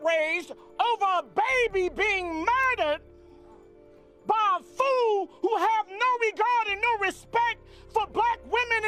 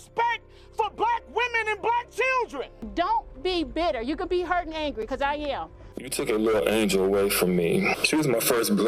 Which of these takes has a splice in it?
second; 2 cuts; at 2.8 s, 6.0 s

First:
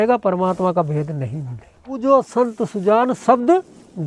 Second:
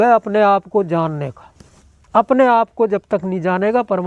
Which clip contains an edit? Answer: first; 1 cut; at 2.0 s

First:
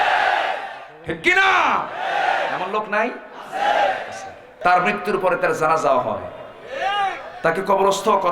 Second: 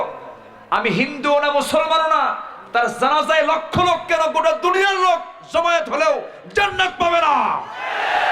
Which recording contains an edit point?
first; 1 cut; at 4.5 s

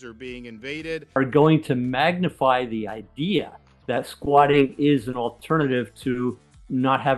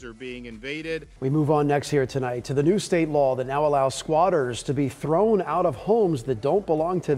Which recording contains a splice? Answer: first; 1 cut; at 1.1 s

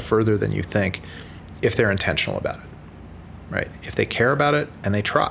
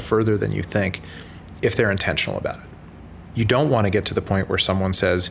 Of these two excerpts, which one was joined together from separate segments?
second; 1 cut; at 3.2 s

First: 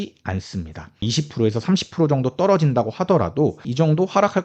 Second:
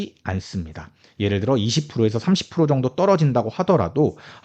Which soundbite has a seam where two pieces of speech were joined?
first; 2 cuts; at 1.0 s, 3.7 s

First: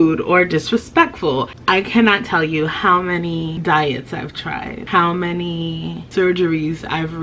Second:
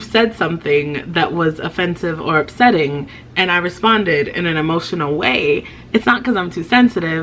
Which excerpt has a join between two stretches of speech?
first; 4 cuts; at 1.5 s, 3.5 s, 4.8 s, 6.0 s

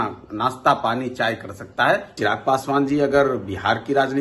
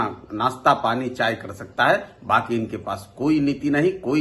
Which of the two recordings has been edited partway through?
first; 1 cut; at 2.2 s

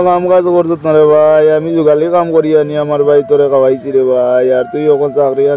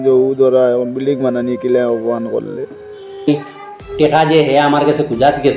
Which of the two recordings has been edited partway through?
second; 1 cut; at 3.3 s

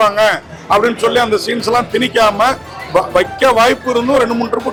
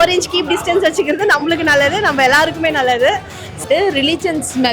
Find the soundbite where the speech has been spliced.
second; 1 cut; at 3.6 s

